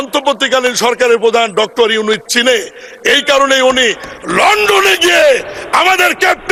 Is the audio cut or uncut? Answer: uncut